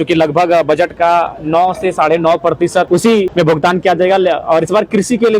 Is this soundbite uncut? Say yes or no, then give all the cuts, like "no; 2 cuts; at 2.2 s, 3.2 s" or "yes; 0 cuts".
no; 1 cut; at 3.1 s